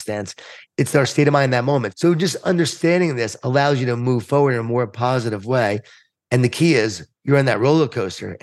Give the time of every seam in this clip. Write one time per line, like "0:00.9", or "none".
0:01.9

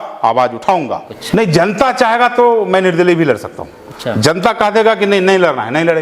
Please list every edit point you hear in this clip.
0:01.2

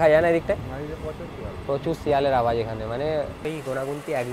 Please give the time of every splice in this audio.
0:03.4

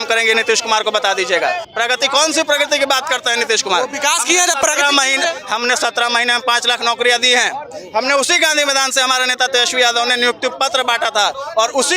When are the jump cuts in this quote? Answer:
0:01.7

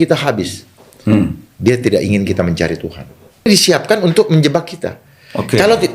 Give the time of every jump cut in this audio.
0:03.4

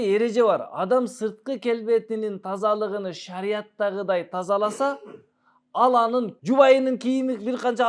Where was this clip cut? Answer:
0:06.4

